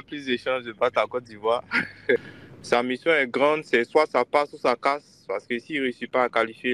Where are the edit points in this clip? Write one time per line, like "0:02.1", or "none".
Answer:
0:02.2